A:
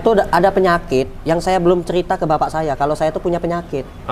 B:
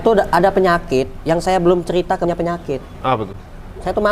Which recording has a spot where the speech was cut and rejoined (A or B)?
B